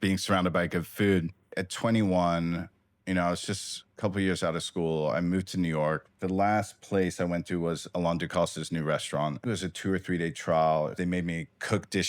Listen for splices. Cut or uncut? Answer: cut